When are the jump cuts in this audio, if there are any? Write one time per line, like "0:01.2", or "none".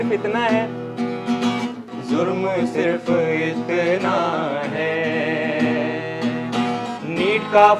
0:01.8

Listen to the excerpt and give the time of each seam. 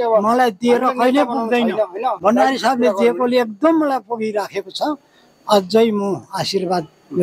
none

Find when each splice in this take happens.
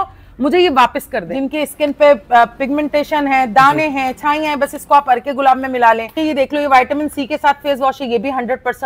0:01.2
0:06.1

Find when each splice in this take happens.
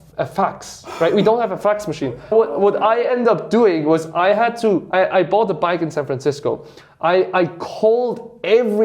0:02.3

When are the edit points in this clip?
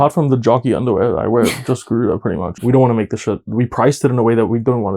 0:02.6

